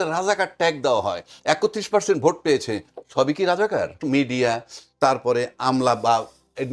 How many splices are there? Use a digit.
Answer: 1